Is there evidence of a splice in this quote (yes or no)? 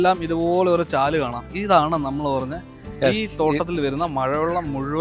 no